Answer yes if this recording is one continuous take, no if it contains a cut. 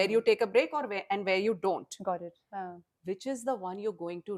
yes